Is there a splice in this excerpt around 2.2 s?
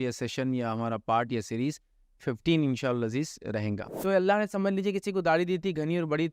no; 1 cut; at 3.9 s

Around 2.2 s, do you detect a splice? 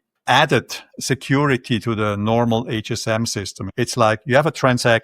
no; 1 cut; at 3.6 s

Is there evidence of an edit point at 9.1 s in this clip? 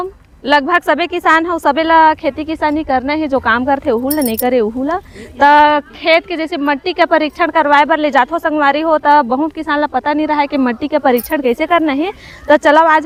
no; 0 cuts

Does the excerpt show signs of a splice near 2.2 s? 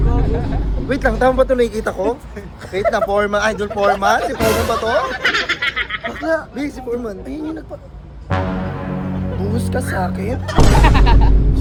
no; 0 cuts

